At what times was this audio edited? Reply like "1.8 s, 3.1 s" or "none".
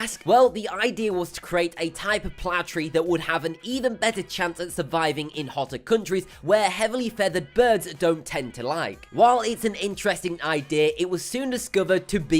none